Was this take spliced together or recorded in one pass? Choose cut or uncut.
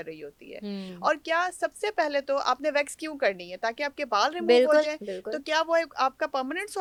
uncut